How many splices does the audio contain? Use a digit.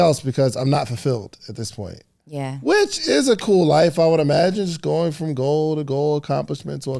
0